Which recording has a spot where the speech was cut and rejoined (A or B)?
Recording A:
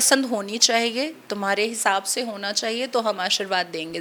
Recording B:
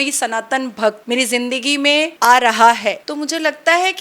B